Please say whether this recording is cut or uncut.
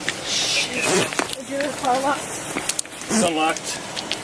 uncut